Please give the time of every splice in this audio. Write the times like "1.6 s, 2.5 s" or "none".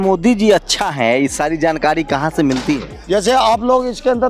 2.9 s